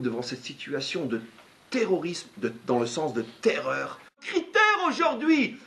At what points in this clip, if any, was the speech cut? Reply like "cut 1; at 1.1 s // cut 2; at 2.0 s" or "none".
cut 1; at 4.2 s